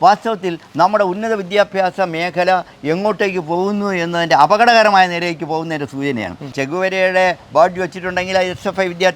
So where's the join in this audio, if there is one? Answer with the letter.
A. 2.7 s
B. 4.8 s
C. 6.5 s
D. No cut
C